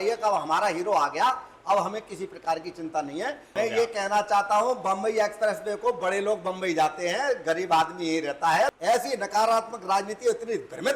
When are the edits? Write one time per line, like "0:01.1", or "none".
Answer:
0:03.5
0:08.8